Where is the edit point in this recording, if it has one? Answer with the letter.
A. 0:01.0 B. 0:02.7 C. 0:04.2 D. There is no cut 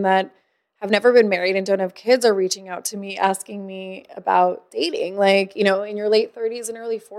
D